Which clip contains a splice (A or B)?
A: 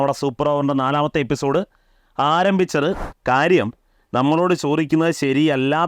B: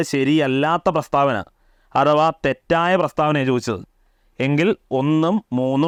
A